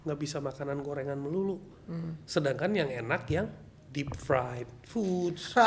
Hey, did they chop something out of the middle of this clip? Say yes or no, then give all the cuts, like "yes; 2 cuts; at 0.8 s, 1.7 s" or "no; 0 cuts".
no; 0 cuts